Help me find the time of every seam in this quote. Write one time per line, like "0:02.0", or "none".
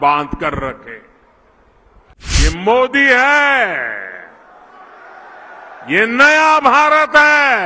0:02.4